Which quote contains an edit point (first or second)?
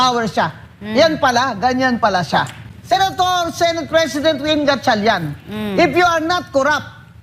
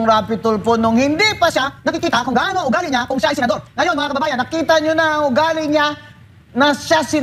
first